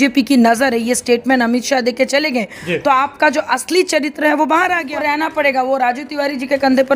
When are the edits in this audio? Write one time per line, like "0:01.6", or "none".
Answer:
0:04.9